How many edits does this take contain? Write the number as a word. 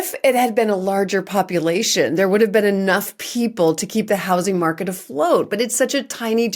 zero